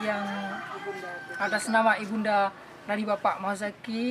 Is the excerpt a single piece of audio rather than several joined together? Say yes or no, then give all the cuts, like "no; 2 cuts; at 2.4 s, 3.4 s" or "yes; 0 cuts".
yes; 0 cuts